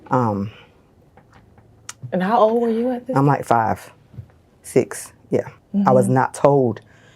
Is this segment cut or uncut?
cut